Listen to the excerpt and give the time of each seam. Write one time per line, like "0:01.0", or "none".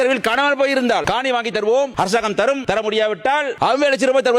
0:01.0
0:02.6